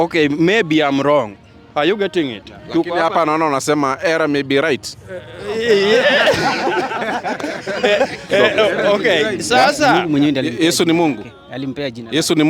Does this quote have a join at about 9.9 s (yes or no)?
yes